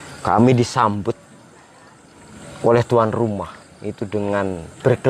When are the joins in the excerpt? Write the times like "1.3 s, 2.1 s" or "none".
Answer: none